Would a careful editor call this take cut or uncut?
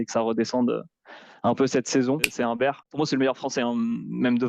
cut